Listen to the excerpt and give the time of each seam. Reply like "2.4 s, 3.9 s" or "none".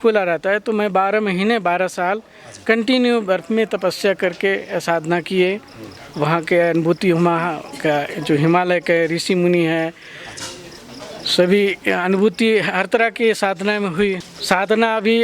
14.3 s